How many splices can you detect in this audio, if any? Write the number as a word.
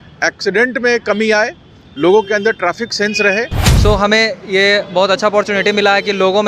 one